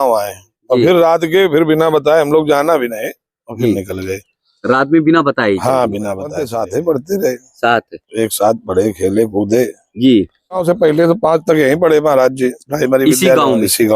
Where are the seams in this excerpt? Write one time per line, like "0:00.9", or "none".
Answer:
0:06.4
0:10.6